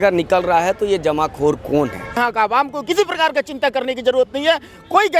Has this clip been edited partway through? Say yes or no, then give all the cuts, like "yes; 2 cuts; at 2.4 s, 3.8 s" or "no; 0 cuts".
yes; 1 cut; at 2.2 s